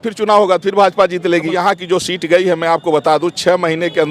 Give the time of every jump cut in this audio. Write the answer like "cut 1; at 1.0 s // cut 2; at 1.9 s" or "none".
cut 1; at 1.5 s

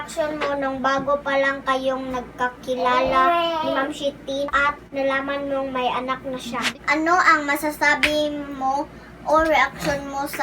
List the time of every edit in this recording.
cut 1; at 4.7 s // cut 2; at 6.8 s

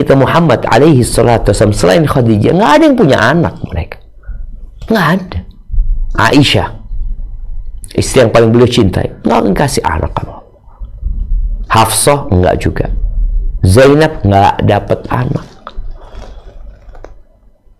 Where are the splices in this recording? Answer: none

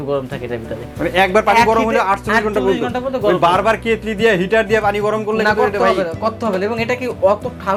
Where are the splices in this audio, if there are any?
none

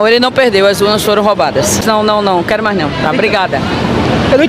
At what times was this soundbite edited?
cut 1; at 1.8 s

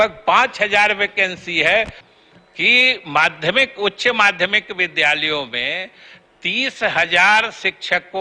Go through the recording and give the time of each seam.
cut 1; at 2.0 s

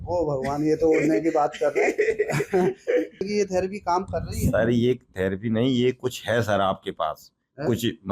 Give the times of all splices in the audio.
cut 1; at 3.2 s

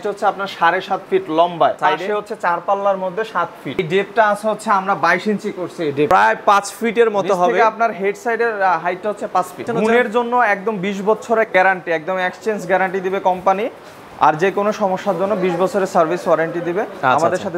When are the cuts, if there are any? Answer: cut 1; at 1.8 s // cut 2; at 3.8 s // cut 3; at 6.1 s // cut 4; at 9.6 s

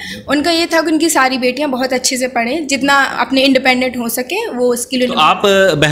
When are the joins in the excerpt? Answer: none

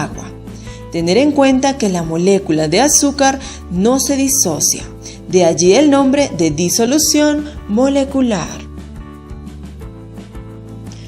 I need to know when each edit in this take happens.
cut 1; at 5.8 s

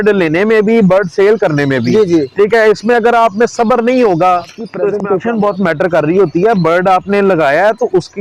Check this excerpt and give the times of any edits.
cut 1; at 4.9 s

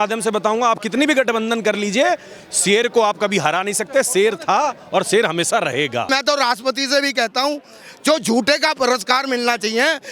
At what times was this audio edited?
cut 1; at 6.1 s

